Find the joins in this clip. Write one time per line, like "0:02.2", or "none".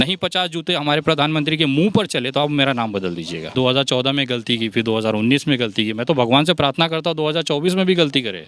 0:03.5